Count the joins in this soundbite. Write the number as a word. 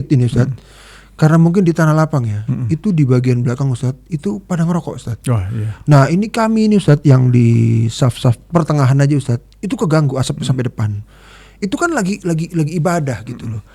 one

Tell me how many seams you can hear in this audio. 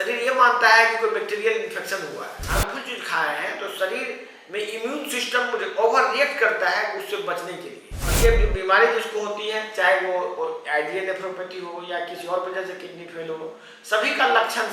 two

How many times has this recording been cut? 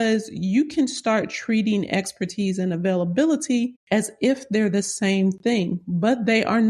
one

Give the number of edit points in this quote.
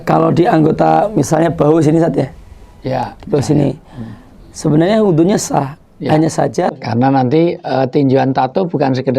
one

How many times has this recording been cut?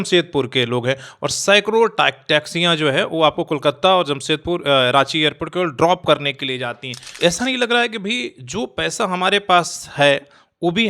one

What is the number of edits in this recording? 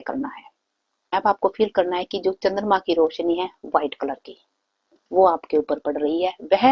one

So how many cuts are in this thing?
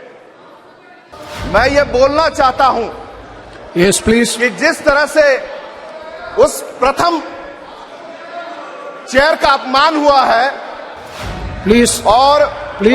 one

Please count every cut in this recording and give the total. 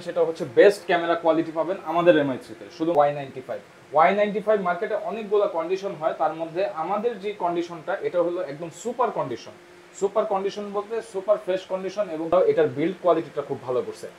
two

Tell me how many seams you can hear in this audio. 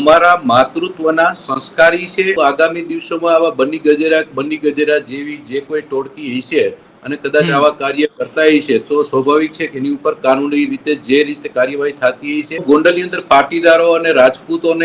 two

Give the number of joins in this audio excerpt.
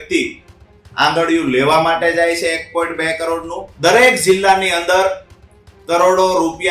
one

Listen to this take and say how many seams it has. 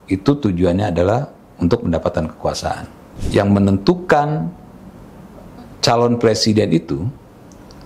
one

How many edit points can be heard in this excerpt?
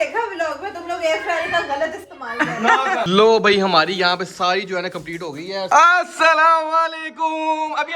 two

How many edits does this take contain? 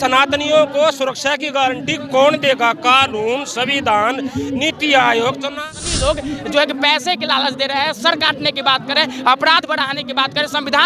one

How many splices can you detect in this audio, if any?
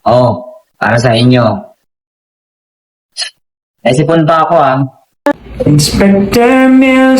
one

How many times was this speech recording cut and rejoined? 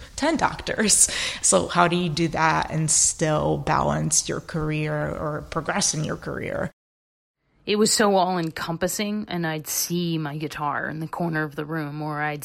two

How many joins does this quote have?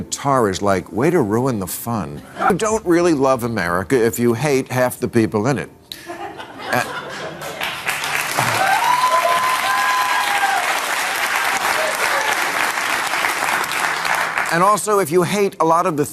one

